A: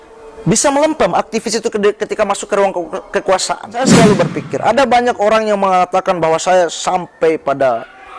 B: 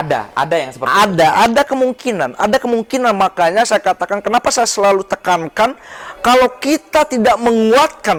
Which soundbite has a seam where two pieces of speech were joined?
A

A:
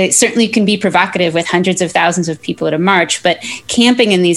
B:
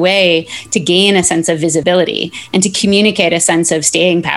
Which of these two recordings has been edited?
B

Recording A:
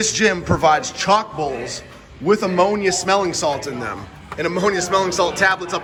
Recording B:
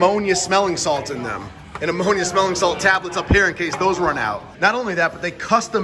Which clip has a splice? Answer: B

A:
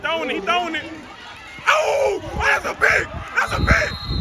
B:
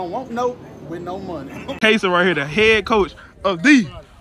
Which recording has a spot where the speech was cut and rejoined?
B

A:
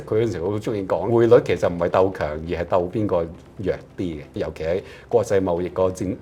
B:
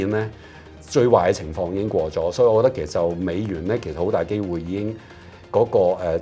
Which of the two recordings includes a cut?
A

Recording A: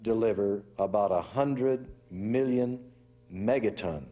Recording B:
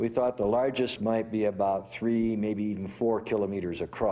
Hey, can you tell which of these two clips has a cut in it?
B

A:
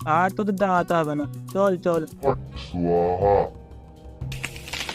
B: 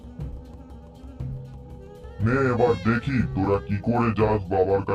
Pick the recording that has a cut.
A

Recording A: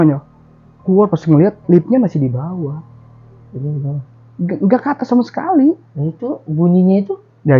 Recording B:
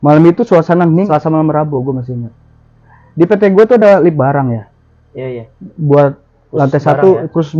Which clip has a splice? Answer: B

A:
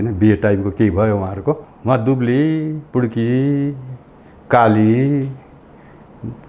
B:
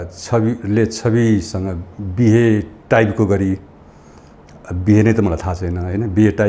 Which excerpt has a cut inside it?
A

